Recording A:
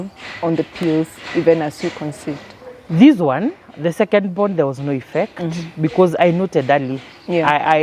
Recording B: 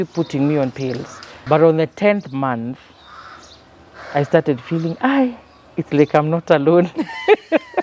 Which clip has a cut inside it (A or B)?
B